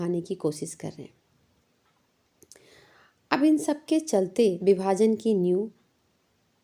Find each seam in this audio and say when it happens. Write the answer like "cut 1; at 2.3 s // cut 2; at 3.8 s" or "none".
cut 1; at 4.6 s